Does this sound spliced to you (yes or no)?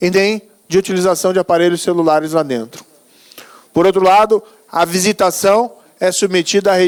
no